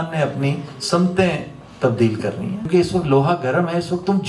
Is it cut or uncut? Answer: cut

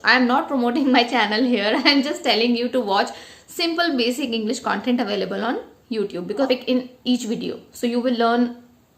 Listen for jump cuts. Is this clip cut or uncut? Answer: cut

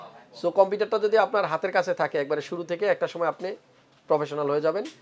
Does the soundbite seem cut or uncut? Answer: uncut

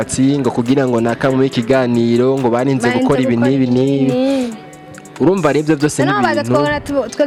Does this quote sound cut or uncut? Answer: uncut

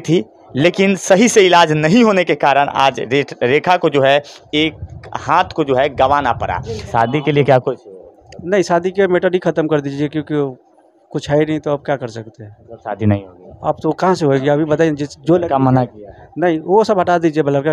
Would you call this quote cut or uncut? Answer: cut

